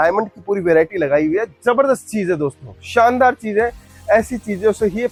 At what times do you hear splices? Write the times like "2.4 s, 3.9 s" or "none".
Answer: none